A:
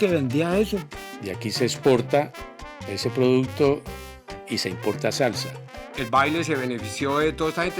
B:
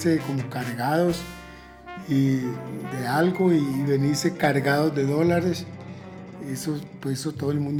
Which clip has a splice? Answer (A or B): A